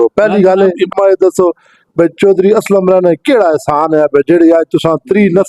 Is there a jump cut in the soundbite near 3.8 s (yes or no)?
no